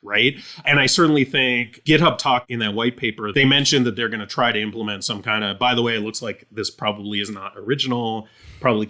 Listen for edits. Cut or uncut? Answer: cut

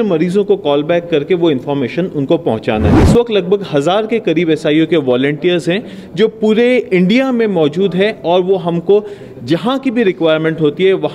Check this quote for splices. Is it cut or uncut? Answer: cut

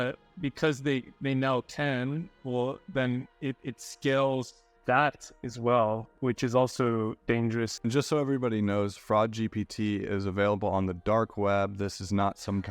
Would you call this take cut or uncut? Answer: cut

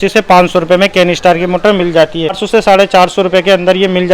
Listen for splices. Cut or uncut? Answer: cut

